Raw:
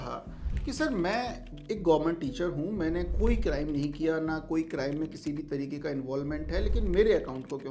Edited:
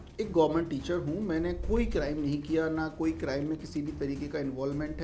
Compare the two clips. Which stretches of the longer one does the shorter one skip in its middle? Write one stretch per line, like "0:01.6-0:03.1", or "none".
none